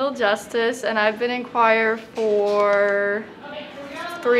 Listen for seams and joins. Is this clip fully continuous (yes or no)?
yes